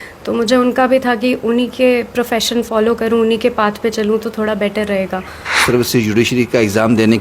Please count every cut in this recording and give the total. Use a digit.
1